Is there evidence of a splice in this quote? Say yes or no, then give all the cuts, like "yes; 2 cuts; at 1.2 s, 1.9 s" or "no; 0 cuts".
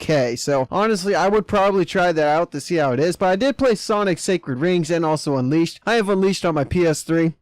yes; 1 cut; at 4.7 s